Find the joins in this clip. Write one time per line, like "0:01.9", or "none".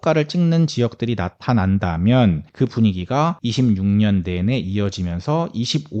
0:02.5
0:03.4